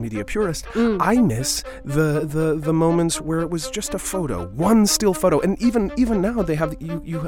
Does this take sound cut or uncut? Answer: cut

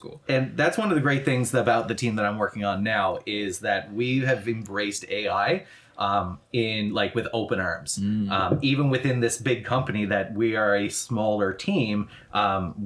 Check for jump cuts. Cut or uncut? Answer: uncut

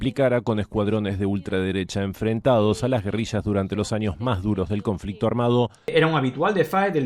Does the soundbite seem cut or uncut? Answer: cut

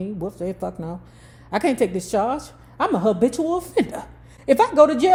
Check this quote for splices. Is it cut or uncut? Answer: uncut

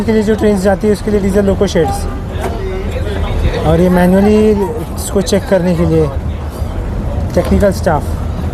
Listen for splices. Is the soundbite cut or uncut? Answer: uncut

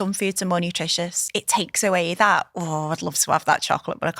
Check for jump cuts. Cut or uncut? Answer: cut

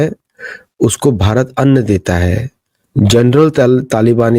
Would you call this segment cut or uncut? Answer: uncut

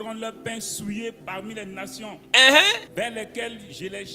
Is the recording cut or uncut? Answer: cut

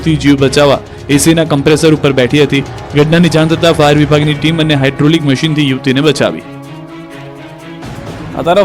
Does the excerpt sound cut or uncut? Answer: uncut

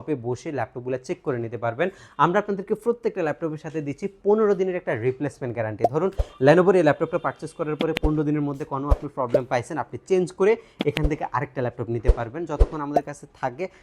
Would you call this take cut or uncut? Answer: uncut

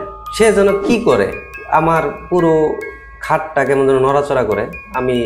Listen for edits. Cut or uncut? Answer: uncut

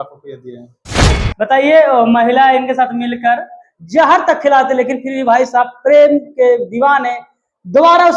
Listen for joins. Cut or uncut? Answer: cut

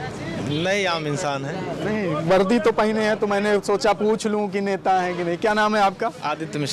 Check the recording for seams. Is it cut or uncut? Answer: uncut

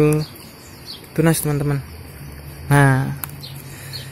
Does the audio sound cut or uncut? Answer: uncut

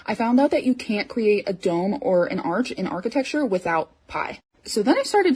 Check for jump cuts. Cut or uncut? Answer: uncut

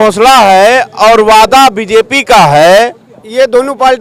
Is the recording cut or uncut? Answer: uncut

